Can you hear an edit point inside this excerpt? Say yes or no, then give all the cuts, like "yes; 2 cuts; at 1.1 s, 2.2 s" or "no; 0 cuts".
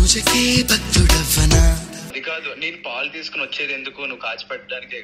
yes; 1 cut; at 2.2 s